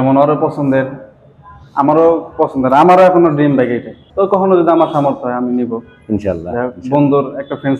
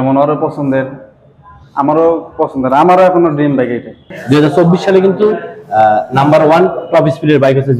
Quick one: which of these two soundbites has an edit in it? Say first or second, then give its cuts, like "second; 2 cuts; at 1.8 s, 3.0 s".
second; 1 cut; at 4.1 s